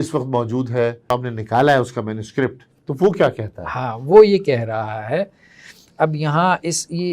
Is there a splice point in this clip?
yes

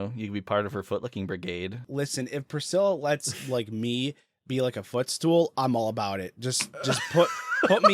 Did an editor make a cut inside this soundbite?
yes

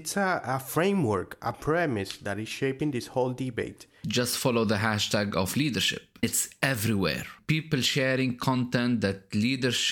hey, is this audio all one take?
no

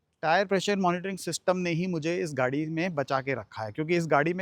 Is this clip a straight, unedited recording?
yes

